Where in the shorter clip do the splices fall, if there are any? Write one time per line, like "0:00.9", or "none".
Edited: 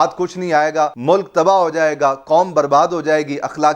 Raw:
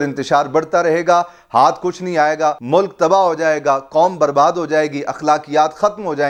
none